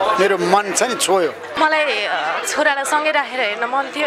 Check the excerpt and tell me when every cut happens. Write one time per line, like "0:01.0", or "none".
0:01.4